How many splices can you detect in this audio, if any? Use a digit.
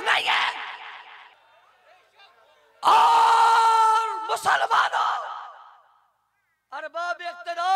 1